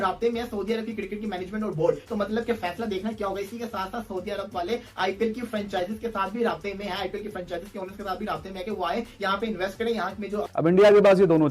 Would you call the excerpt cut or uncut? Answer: cut